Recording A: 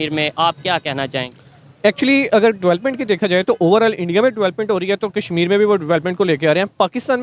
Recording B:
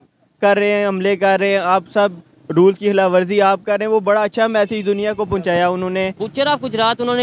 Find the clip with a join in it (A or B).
B